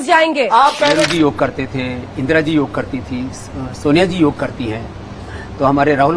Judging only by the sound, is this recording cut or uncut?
cut